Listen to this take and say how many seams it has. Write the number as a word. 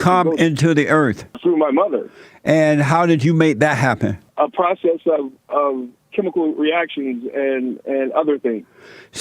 two